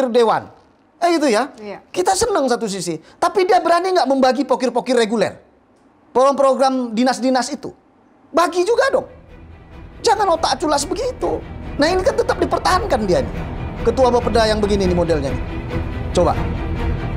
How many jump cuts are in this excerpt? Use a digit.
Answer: 0